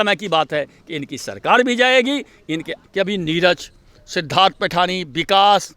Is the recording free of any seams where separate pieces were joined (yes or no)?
no